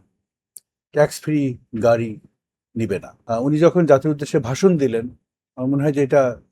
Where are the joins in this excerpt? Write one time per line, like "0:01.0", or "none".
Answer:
0:03.1